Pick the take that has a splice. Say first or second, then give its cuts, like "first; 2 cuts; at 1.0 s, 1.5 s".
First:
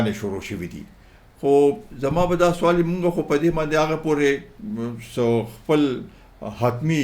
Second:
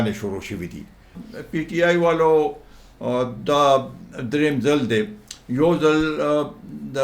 second; 1 cut; at 1.2 s